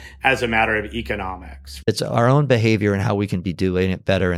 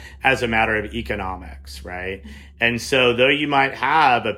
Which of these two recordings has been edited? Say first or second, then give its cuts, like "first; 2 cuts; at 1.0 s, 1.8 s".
first; 1 cut; at 1.9 s